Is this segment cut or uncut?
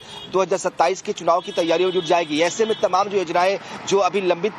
uncut